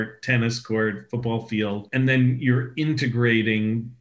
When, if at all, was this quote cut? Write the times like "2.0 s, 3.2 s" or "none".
1.8 s